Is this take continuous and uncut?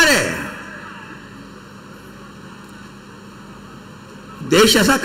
yes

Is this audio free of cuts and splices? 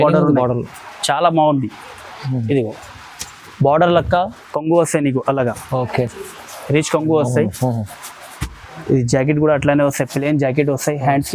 yes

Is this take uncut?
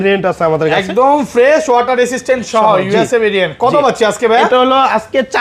yes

